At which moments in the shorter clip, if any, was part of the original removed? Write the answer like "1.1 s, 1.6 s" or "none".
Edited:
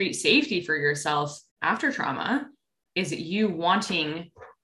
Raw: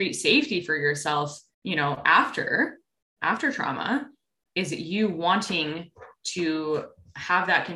1.4 s